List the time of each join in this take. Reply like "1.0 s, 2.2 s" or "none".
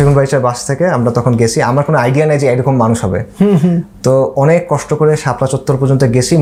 none

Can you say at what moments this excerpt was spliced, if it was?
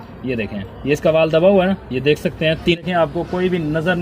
2.8 s

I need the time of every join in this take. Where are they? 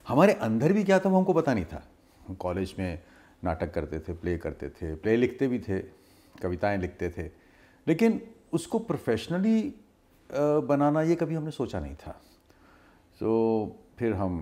none

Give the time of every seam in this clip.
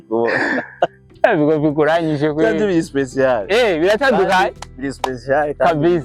none

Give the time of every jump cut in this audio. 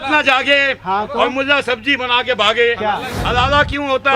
3.2 s

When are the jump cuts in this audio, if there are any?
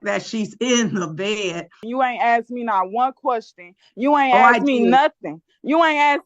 1.8 s

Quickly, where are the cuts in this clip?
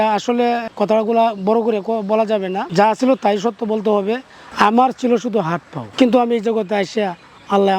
2.6 s, 5.7 s

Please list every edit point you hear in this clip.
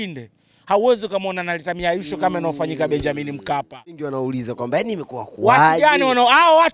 4.1 s

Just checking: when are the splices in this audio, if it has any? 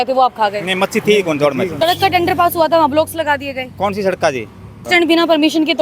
1.7 s, 4.9 s

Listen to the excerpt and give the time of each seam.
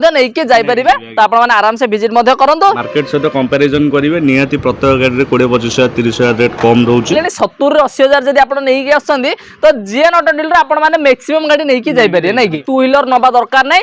2.8 s, 7.1 s, 12.6 s

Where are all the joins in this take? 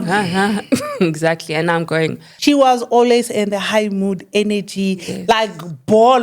2.3 s

